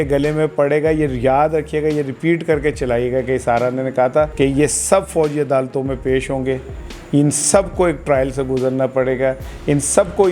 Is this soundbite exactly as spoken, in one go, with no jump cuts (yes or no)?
no